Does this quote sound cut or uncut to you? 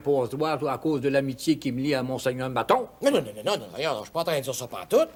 uncut